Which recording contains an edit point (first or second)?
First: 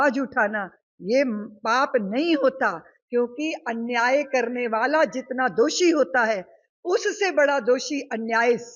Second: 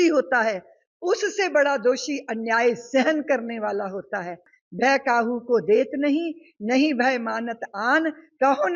second